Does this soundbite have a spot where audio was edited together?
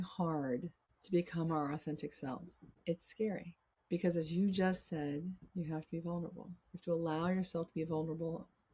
no; 0 cuts

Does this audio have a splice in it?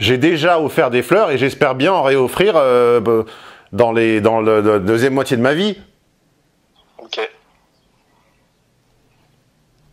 no; 0 cuts

